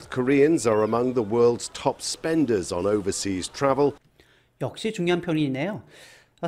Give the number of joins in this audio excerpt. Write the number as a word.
zero